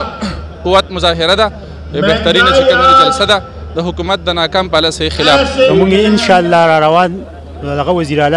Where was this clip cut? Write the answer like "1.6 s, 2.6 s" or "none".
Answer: 5.7 s

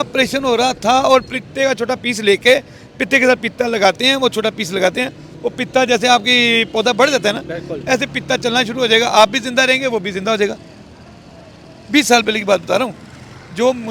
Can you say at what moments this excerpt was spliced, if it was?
none

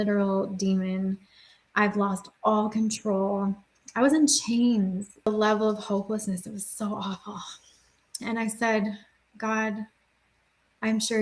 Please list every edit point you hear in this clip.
5.3 s

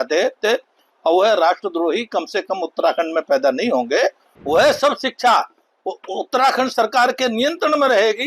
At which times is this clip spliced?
4.3 s

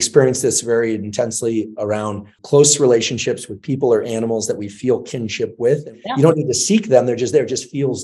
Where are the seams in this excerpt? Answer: 2.3 s, 5.9 s

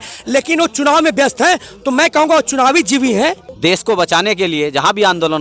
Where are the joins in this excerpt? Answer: 3.5 s

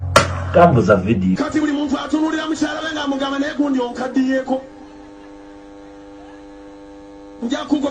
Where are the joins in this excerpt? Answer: 1.1 s

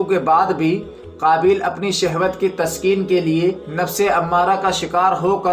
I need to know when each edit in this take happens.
none

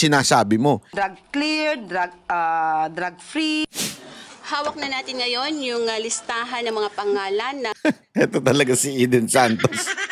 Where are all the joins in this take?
0.9 s

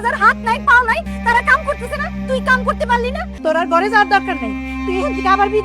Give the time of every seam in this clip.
1.1 s, 3.3 s

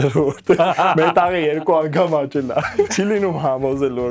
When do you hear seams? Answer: 2.9 s

